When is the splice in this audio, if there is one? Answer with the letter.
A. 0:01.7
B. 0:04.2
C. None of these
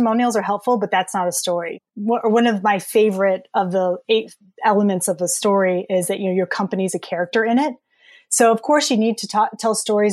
A